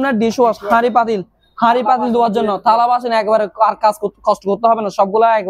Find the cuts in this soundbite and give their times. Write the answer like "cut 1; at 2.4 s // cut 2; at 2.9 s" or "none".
none